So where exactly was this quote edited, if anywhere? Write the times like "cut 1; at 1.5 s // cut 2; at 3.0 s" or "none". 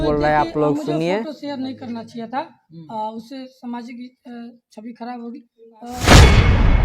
cut 1; at 1.2 s

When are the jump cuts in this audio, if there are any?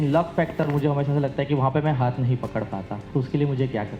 cut 1; at 3.0 s

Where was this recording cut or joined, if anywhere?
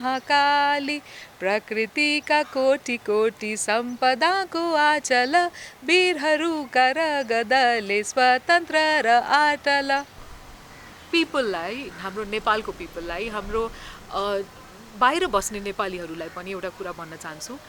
cut 1; at 10.2 s

